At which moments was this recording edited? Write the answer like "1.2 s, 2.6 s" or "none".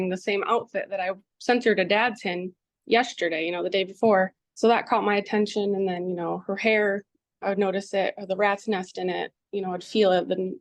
1.3 s, 4.4 s